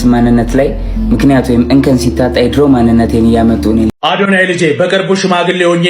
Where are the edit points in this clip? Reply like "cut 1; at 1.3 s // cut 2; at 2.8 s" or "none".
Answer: cut 1; at 3.9 s